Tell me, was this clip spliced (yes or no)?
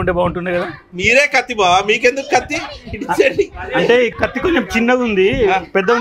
yes